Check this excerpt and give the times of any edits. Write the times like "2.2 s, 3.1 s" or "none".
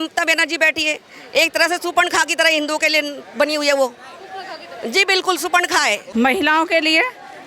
6.0 s